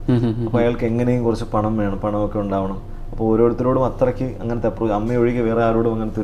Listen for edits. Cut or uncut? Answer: uncut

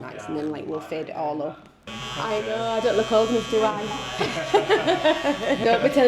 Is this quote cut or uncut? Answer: cut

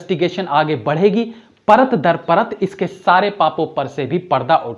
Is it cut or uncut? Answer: uncut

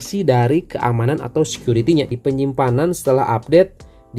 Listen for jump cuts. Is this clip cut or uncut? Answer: cut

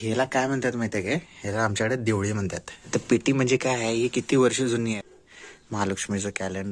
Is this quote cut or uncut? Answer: cut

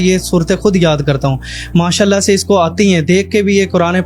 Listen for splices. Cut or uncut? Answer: uncut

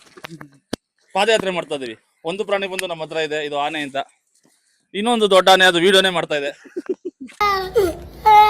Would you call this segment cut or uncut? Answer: cut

